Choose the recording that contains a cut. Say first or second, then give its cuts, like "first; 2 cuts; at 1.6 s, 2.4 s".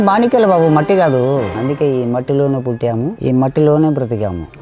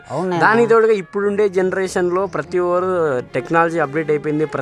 first; 2 cuts; at 1.5 s, 3.1 s